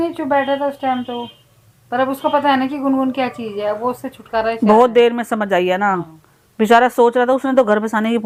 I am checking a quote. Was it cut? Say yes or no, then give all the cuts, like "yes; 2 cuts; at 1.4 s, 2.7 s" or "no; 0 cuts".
no; 0 cuts